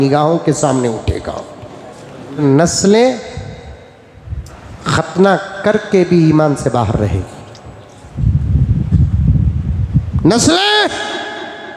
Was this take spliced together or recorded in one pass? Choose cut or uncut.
cut